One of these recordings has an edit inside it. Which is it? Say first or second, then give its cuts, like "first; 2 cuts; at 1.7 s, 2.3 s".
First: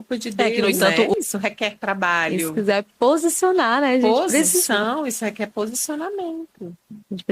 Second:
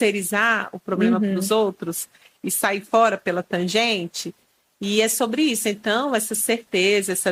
first; 1 cut; at 1.1 s